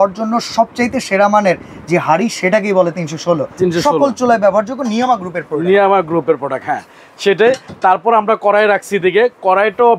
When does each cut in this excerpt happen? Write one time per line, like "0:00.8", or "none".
none